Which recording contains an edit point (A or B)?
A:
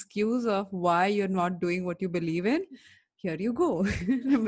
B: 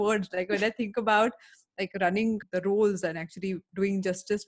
B